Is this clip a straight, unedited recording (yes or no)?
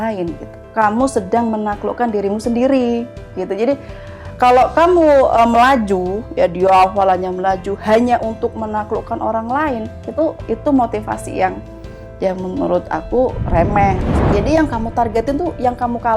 no